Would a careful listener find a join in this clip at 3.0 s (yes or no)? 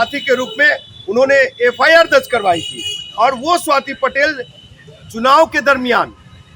no